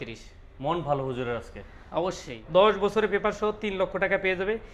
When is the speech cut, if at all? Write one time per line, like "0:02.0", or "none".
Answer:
0:02.3